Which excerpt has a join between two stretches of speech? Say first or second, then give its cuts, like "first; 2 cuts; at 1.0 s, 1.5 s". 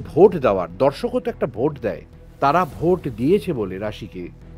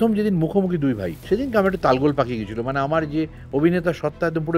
second; 1 cut; at 1.1 s